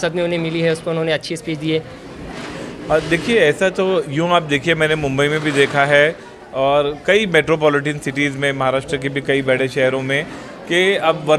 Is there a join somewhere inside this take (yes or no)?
no